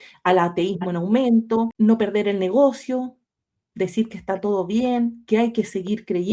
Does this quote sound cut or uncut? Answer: cut